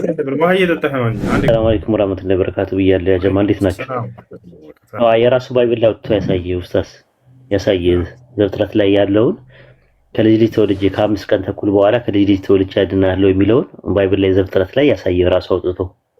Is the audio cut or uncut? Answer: cut